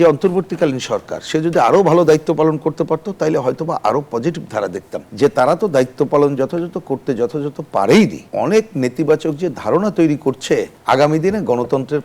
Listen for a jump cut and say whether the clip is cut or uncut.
cut